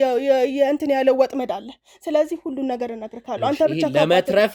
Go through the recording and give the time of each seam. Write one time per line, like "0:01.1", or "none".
none

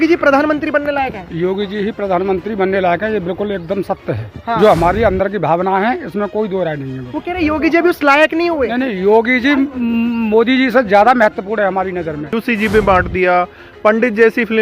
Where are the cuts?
0:12.3

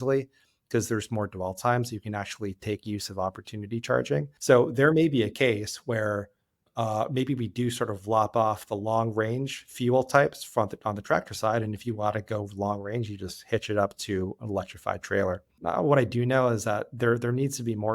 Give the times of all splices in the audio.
0:04.3
0:06.7
0:15.6

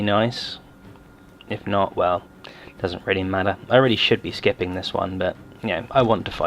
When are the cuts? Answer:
0:04.2

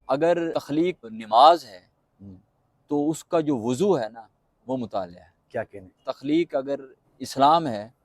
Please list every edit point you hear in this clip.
0:01.1

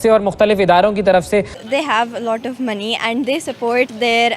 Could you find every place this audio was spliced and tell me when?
0:01.6

